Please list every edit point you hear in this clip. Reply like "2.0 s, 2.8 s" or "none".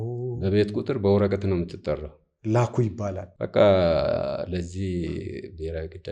3.3 s